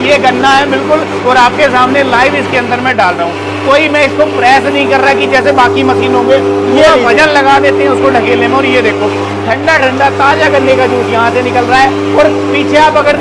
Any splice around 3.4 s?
no; 0 cuts

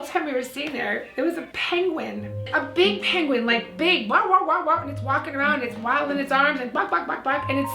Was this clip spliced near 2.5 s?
yes; 1 cut; at 2.5 s

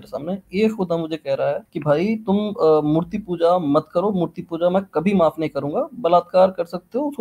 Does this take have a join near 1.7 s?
yes; 1 cut; at 1.7 s

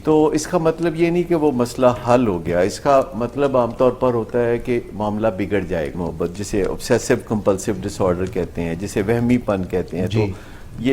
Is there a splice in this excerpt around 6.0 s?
yes; 1 cut; at 6.0 s

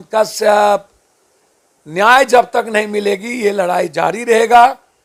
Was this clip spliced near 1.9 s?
no; 0 cuts

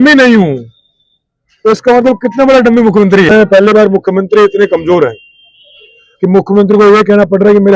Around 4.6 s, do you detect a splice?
no; 1 cut; at 3.3 s

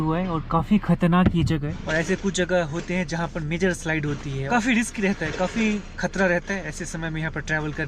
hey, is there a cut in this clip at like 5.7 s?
no; 2 cuts; at 1.8 s, 4.4 s

